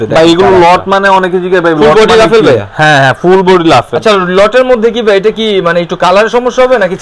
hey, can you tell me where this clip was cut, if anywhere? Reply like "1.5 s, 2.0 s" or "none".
none